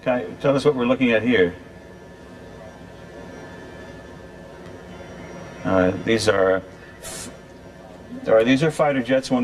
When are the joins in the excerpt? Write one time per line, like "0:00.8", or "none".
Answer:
0:02.4